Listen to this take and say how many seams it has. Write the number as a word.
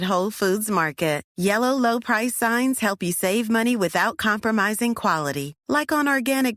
zero